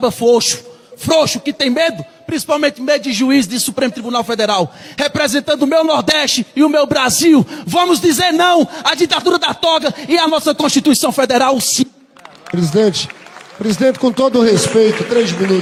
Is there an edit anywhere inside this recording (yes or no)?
no